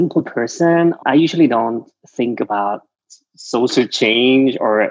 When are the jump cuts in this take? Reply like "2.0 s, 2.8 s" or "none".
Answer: 1.0 s

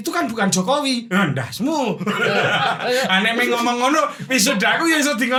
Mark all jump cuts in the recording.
none

